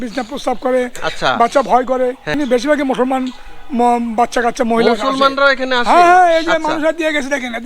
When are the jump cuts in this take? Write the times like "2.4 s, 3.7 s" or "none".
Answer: 2.4 s

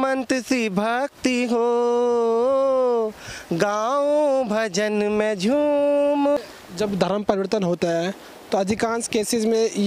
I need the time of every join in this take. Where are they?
6.4 s

